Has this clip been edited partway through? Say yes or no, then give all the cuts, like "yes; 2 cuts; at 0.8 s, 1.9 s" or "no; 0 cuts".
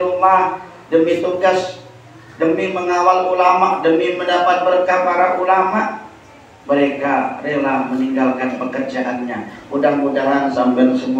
no; 0 cuts